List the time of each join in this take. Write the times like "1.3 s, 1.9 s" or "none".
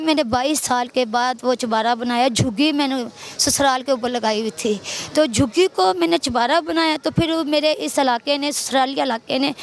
none